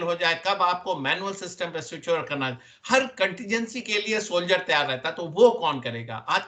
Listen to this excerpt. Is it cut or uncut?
uncut